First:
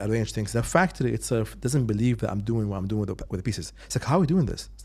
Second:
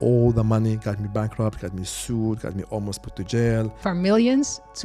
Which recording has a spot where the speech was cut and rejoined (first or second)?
second